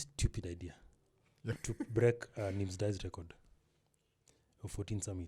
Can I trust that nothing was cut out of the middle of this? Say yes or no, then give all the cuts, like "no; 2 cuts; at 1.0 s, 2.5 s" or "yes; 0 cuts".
no; 1 cut; at 1.6 s